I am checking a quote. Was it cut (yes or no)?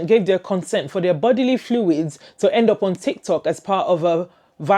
no